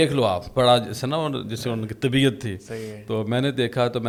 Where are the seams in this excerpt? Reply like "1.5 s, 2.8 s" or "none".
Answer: none